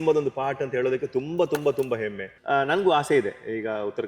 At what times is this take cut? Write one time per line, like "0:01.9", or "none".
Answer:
0:02.3